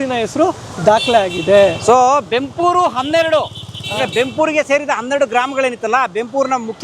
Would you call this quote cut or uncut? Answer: uncut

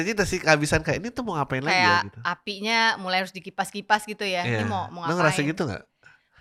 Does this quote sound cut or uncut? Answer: uncut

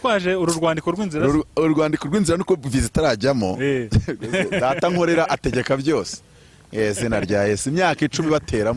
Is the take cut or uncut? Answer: uncut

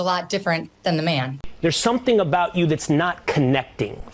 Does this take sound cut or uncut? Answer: cut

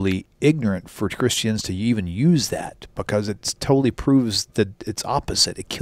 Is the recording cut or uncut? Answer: uncut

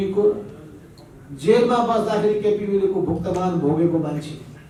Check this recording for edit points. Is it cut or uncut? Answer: uncut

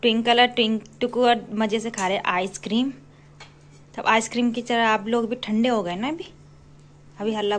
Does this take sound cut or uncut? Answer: uncut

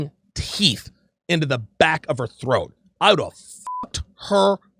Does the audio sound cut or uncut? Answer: uncut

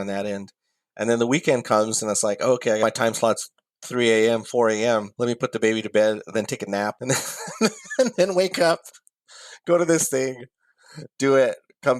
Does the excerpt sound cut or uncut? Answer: cut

